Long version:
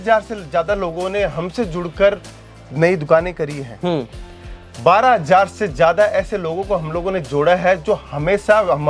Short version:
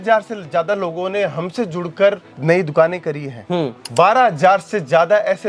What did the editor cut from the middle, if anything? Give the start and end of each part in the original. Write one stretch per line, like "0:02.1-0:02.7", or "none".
0:02.3-0:02.6
0:04.1-0:04.7